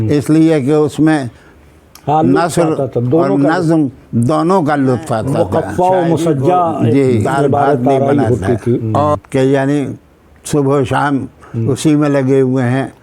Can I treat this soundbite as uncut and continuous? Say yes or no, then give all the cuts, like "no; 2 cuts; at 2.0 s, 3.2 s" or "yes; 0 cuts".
no; 1 cut; at 9.2 s